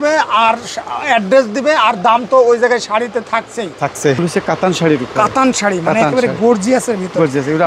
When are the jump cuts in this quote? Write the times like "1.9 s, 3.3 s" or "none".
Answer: 4.2 s